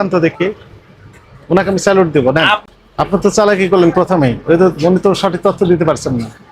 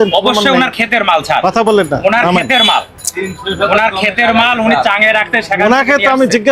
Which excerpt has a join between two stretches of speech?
first; 1 cut; at 2.6 s

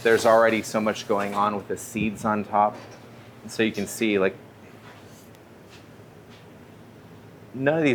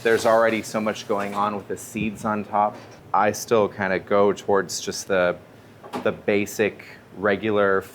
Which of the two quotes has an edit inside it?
second; 1 cut; at 2.9 s

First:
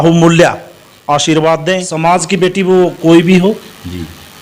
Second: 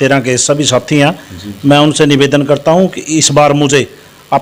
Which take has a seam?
first; 1 cut; at 1.9 s

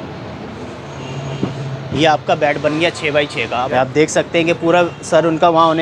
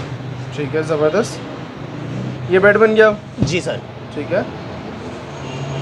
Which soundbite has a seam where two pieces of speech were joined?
first; 1 cut; at 3.7 s

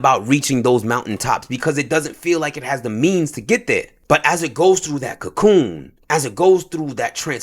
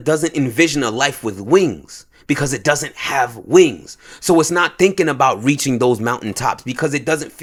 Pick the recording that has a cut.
first; 1 cut; at 3.9 s

